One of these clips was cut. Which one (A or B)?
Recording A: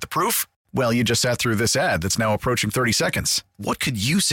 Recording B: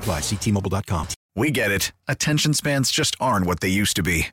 B